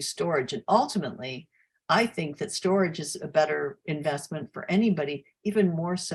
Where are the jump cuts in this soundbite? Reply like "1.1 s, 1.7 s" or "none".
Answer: none